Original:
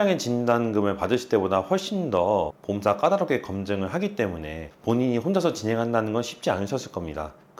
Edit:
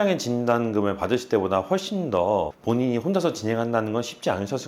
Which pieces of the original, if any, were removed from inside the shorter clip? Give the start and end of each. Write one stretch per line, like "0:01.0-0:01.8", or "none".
0:02.6-0:04.8